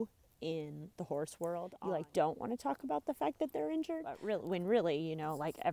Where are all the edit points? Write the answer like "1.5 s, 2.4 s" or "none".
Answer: 1.7 s, 4.2 s